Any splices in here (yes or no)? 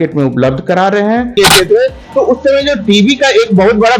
yes